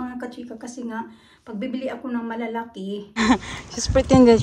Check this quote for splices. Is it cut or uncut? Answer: cut